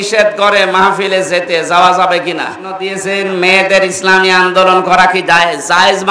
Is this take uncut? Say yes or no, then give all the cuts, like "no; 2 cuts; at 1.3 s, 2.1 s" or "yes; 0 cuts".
no; 1 cut; at 2.9 s